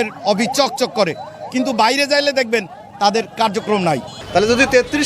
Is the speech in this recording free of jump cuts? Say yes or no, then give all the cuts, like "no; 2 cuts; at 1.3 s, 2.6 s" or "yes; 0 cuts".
no; 1 cut; at 4.1 s